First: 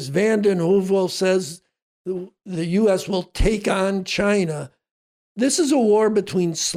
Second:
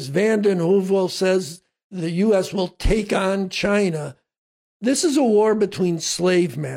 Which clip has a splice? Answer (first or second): second